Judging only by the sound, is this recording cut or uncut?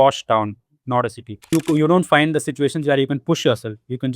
cut